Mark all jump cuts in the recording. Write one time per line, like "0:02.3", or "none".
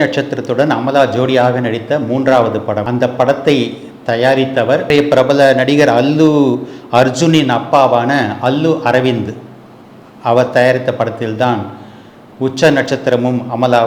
0:02.9
0:04.9